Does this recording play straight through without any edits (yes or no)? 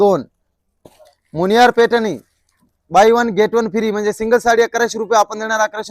yes